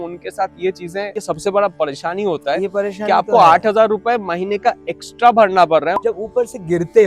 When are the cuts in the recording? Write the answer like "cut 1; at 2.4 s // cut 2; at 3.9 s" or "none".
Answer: cut 1; at 1.2 s // cut 2; at 5.9 s